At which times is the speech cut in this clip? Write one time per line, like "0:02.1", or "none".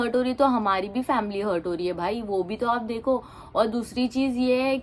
none